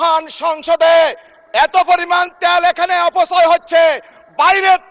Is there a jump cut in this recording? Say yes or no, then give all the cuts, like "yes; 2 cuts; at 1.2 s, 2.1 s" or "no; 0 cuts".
no; 0 cuts